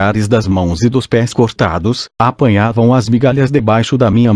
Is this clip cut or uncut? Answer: cut